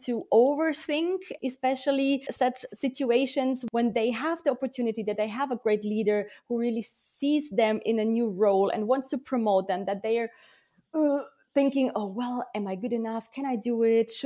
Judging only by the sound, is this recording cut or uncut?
cut